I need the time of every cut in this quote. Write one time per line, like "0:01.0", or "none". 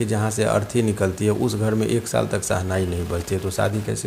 none